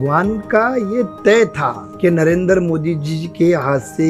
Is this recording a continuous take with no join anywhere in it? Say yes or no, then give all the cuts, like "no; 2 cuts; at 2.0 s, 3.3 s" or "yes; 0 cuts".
no; 1 cut; at 1.8 s